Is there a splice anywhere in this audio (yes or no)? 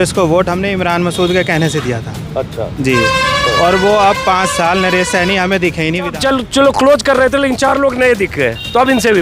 yes